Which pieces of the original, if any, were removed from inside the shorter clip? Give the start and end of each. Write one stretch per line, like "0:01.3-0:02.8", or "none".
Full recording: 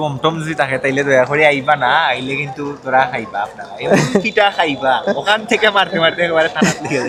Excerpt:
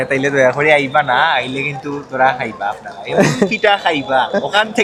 none